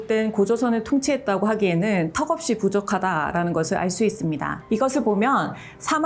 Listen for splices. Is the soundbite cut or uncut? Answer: cut